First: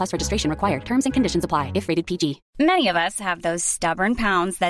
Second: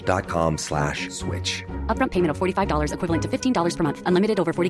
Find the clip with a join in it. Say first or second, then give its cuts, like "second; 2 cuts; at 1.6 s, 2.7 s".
first; 1 cut; at 2.4 s